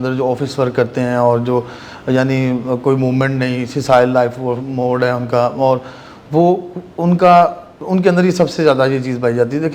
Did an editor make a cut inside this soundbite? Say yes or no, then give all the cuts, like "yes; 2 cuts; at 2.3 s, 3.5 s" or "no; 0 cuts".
no; 0 cuts